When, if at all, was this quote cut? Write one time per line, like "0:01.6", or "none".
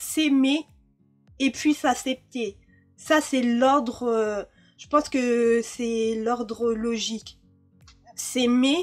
none